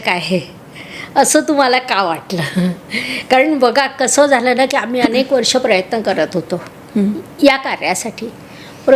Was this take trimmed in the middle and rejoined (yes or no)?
no